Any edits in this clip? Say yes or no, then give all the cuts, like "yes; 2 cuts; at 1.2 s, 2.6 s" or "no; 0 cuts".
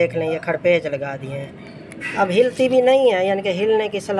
no; 0 cuts